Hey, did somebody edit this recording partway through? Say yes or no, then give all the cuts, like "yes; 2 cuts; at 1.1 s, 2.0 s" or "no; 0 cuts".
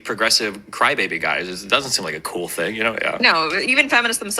yes; 1 cut; at 2.9 s